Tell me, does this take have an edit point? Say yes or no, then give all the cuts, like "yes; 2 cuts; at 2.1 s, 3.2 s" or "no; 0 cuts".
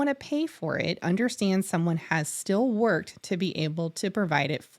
no; 0 cuts